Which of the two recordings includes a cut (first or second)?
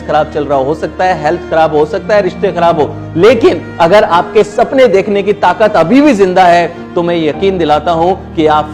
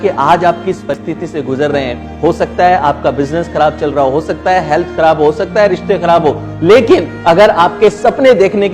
second